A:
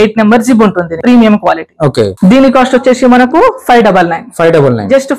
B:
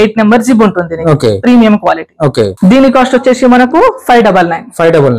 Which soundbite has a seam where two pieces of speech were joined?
A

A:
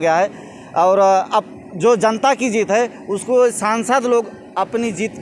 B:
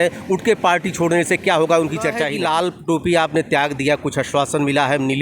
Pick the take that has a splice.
B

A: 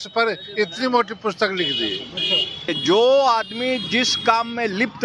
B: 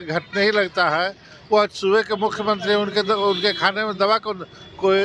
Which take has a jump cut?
A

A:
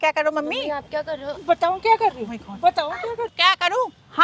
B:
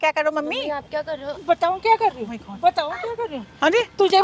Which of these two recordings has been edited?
A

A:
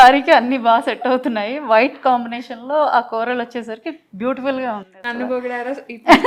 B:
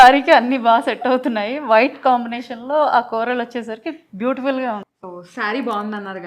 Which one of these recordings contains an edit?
B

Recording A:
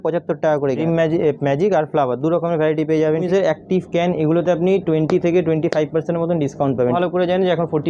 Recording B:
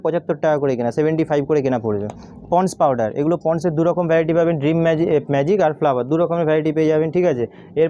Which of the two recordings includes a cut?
A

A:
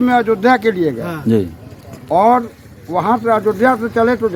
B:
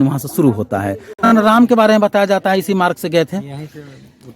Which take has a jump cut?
B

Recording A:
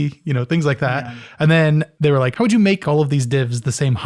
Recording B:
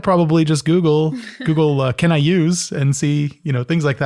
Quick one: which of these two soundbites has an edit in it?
A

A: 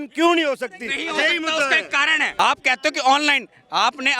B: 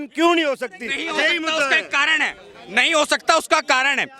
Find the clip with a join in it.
A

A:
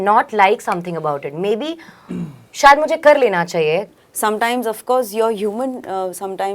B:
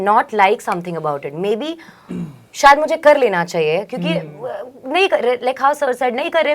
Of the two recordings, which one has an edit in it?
A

